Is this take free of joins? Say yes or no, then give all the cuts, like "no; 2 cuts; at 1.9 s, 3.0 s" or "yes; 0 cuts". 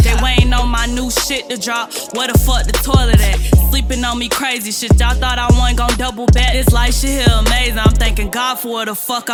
yes; 0 cuts